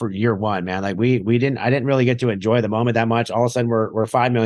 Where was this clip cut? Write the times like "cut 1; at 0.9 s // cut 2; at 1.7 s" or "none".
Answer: none